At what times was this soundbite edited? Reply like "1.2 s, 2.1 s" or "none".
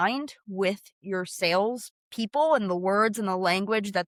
none